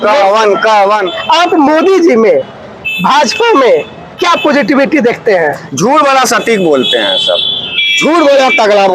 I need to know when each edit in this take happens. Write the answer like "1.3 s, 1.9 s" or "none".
1.0 s